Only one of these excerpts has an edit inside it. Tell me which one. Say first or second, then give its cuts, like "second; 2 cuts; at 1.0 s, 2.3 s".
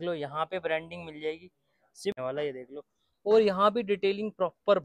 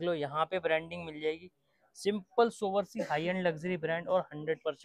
first; 1 cut; at 2.2 s